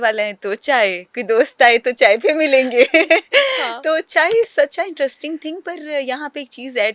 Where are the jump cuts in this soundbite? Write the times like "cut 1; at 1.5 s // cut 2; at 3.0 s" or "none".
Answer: none